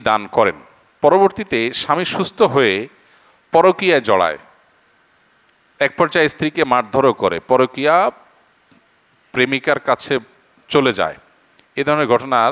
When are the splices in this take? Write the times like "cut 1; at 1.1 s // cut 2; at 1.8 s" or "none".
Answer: none